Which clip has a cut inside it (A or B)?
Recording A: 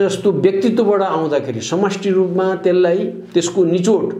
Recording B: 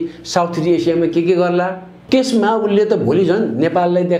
B